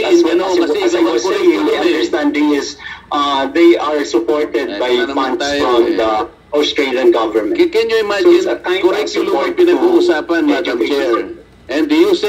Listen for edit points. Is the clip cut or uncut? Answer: uncut